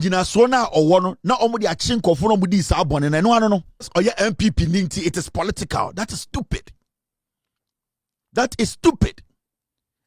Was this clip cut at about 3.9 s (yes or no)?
yes